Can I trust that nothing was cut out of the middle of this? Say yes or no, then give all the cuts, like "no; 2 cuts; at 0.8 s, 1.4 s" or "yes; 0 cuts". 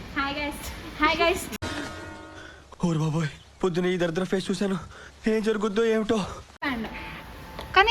no; 1 cut; at 6.6 s